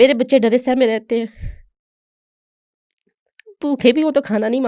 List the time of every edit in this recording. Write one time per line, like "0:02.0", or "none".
none